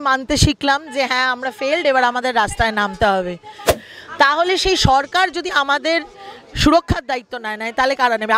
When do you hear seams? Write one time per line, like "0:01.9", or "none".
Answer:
0:03.7